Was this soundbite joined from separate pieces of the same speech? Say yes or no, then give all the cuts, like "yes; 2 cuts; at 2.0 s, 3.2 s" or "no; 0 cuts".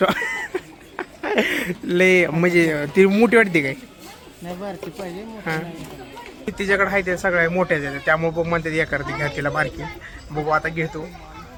no; 0 cuts